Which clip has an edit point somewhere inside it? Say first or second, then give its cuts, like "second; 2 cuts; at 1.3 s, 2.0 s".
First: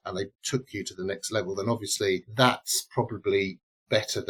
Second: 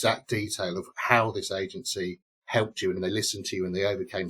second; 1 cut; at 3.0 s